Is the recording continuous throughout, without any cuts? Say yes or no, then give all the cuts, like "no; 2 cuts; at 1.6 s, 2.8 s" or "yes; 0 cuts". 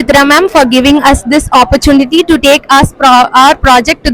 yes; 0 cuts